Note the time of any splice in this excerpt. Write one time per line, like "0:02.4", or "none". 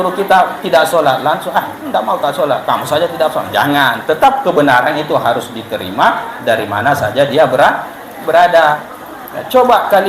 0:08.8

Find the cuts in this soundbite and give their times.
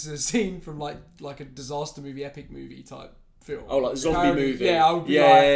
none

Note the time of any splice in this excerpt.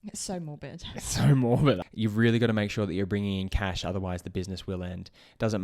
0:01.8

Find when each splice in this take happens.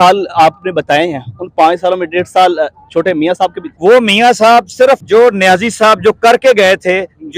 0:03.7
0:05.0

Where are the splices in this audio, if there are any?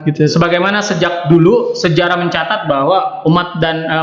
none

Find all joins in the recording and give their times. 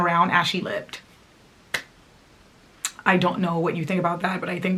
none

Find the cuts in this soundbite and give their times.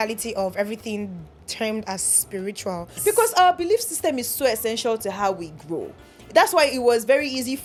none

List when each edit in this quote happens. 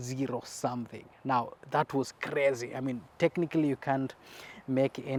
none

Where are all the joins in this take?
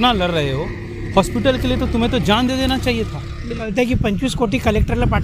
0:03.6

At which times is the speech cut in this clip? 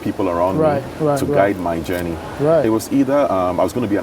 none

